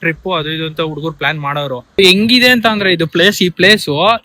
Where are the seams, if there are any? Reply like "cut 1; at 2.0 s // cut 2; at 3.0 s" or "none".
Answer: cut 1; at 1.9 s